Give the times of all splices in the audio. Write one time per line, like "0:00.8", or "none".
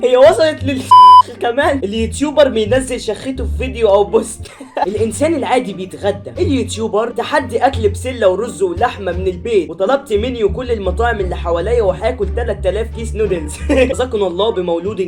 0:04.9
0:14.0